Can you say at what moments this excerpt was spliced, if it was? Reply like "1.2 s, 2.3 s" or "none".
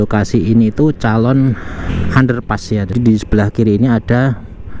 1.9 s, 2.9 s

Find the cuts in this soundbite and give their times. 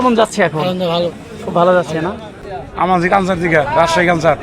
2.3 s

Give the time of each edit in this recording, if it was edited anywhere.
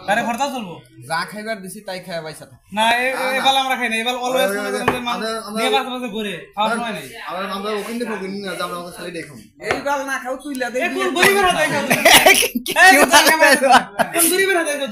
none

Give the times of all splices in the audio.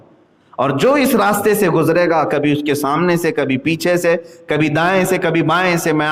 none

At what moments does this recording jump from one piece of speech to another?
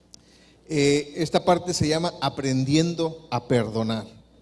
2.3 s

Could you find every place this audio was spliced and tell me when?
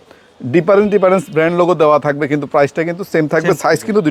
none

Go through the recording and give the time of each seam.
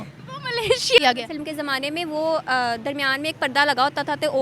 1.0 s

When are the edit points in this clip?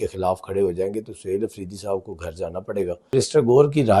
3.1 s

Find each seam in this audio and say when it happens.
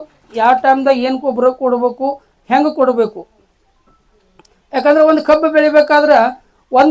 none

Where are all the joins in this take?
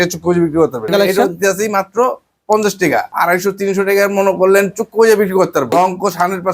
0.9 s, 3.1 s, 5.7 s

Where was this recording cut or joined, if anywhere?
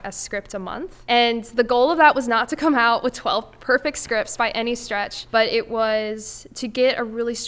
1.0 s, 5.2 s

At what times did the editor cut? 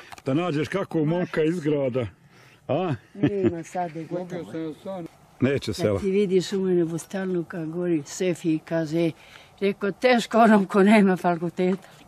5.0 s

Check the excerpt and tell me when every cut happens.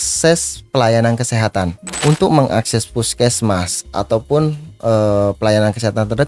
1.8 s

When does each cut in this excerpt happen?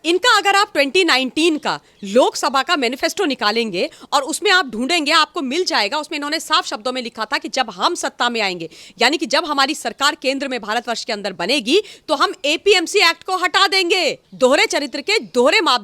14.2 s

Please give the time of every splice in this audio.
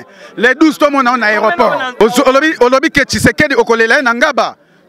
2.0 s

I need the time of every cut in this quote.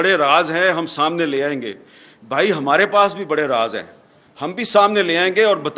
none

